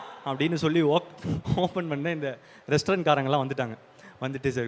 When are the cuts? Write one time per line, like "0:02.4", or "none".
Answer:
0:01.4